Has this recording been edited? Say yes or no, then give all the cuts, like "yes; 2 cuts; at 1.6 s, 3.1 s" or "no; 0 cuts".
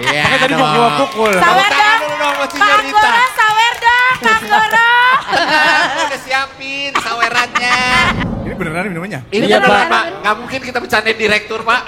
yes; 1 cut; at 8.2 s